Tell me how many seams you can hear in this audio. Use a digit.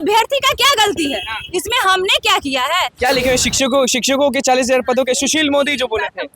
1